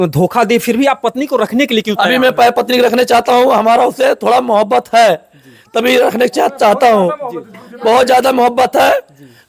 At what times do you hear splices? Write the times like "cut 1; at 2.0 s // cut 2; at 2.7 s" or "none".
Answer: none